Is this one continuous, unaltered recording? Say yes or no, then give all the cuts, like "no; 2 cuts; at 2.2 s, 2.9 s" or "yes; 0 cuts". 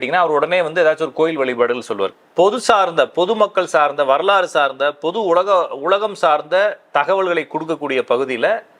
no; 1 cut; at 2.1 s